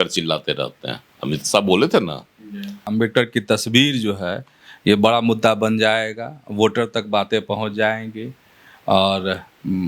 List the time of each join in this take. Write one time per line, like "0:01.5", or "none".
0:02.9